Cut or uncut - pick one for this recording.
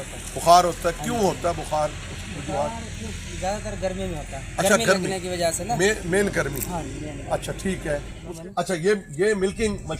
cut